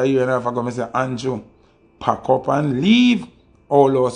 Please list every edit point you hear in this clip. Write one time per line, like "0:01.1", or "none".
none